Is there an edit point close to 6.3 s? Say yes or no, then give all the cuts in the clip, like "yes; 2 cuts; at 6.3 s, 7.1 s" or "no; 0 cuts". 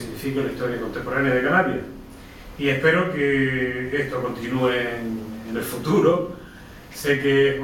yes; 1 cut; at 6.3 s